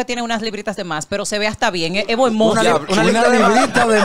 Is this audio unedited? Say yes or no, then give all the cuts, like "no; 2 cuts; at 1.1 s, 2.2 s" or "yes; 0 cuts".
yes; 0 cuts